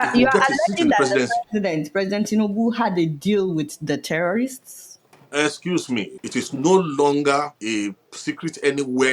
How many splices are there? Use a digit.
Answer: 2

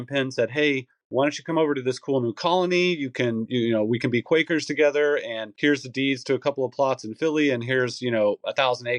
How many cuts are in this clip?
1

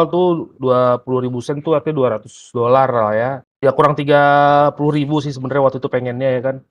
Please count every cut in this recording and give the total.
0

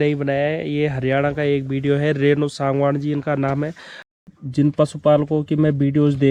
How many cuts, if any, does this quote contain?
1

